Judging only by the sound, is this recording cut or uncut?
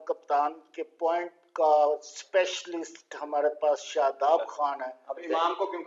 uncut